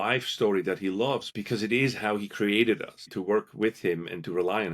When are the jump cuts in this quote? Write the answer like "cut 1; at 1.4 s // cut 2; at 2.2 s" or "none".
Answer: cut 1; at 1.3 s // cut 2; at 3.1 s

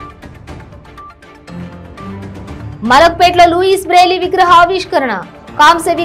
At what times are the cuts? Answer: cut 1; at 1.6 s

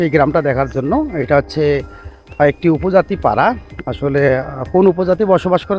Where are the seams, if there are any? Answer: none

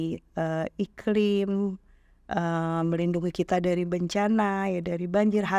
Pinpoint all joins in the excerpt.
none

